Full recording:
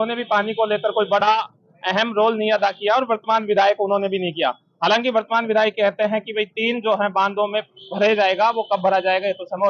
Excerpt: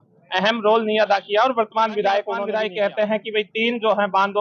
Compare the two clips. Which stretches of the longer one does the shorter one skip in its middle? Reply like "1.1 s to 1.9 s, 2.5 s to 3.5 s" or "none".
3.9 s to 5.4 s